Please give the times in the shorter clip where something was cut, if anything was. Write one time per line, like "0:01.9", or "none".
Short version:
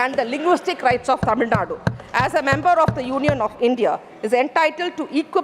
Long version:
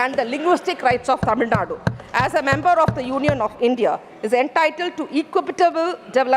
none

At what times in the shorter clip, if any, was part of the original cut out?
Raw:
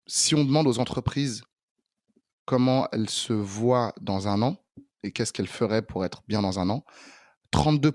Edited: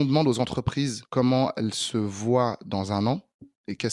0:01.0

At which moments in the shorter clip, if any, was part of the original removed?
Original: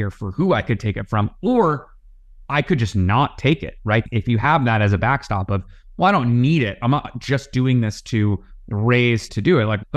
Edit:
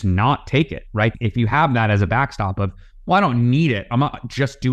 none

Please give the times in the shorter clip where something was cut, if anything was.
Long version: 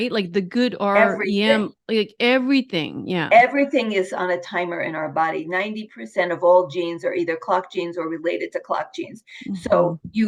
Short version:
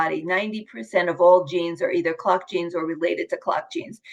none

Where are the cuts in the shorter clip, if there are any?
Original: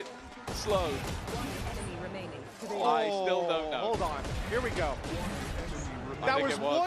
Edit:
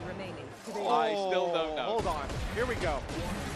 none

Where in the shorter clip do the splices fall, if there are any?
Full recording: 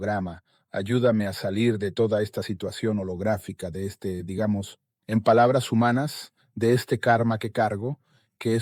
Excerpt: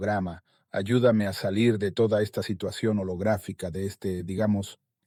none

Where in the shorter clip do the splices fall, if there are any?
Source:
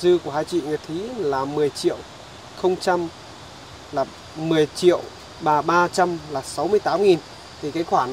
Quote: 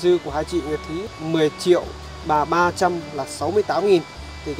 0:01.1

